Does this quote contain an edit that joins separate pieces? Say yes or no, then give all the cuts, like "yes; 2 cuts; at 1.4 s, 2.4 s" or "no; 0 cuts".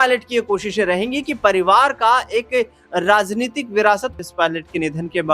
yes; 1 cut; at 4.2 s